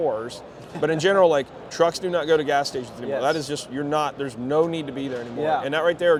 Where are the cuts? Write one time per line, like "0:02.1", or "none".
none